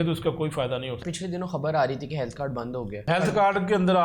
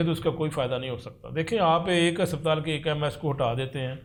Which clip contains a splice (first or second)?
first